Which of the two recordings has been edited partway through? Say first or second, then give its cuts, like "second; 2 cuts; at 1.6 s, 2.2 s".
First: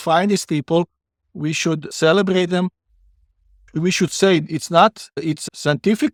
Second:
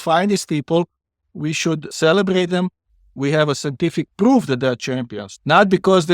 second; 1 cut; at 3.1 s